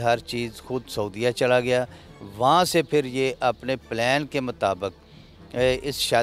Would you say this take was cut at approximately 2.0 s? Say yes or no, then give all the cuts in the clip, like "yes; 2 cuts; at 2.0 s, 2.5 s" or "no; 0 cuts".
no; 0 cuts